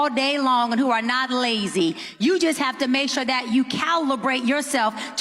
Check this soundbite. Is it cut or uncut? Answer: uncut